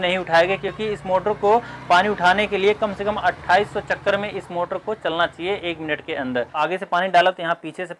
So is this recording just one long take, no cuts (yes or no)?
no